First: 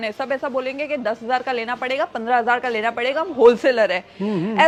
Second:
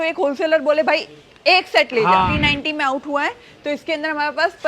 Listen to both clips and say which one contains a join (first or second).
second